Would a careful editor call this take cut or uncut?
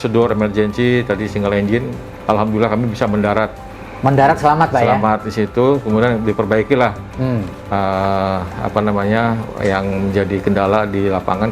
uncut